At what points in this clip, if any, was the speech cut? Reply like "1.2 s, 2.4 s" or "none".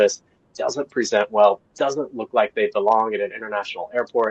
none